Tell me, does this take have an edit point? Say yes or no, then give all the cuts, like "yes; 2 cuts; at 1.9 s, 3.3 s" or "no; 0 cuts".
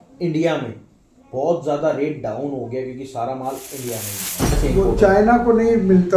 yes; 1 cut; at 4.6 s